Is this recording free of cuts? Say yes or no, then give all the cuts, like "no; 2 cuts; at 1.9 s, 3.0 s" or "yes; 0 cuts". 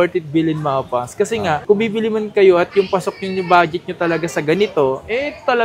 yes; 0 cuts